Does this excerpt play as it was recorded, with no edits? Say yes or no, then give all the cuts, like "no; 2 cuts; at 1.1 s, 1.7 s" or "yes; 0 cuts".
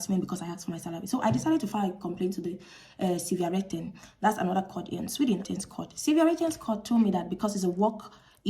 no; 1 cut; at 5.5 s